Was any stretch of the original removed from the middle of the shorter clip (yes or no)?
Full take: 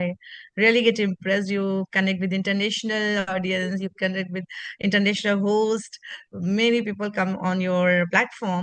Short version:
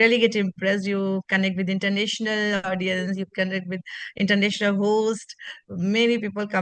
no